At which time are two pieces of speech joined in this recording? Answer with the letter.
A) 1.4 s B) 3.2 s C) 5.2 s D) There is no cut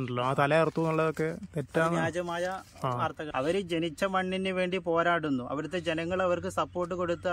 B